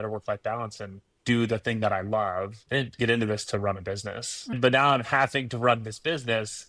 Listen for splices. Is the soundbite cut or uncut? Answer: cut